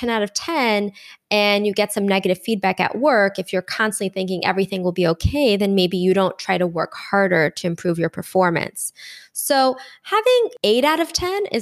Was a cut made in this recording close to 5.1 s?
no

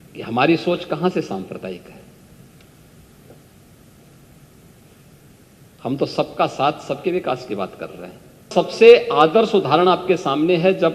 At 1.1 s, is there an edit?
no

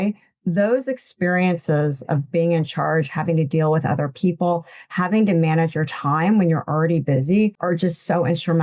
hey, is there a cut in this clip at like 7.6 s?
yes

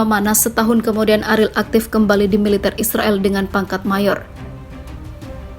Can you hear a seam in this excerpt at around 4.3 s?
yes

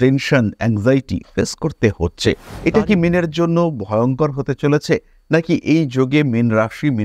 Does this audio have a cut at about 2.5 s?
yes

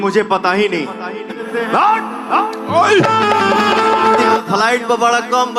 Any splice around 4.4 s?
yes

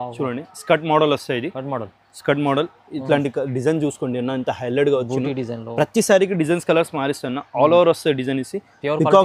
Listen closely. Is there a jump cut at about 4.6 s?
no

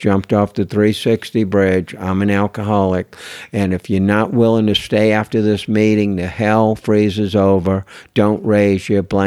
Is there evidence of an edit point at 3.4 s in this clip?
no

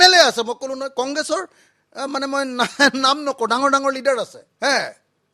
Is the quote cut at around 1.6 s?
no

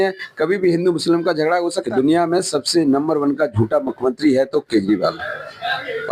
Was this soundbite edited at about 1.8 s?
yes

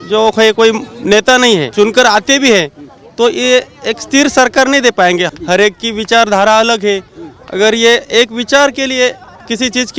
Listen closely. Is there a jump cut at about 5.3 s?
yes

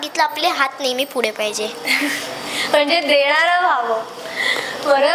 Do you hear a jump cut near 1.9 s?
no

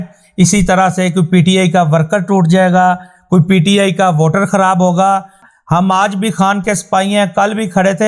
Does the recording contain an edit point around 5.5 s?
yes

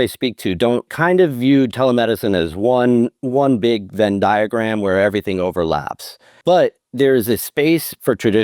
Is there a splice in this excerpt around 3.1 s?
no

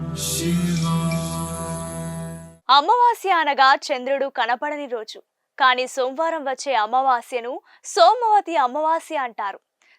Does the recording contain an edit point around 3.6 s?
no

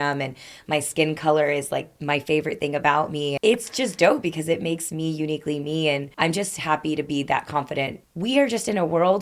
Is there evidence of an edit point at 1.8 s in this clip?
no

